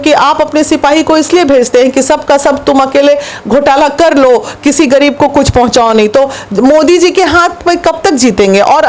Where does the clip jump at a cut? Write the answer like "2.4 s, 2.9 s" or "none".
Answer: none